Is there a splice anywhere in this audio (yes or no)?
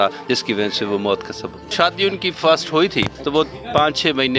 yes